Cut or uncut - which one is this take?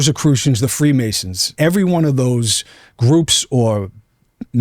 cut